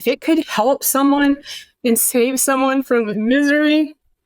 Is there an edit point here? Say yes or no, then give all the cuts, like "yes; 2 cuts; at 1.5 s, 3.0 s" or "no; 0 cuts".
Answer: no; 0 cuts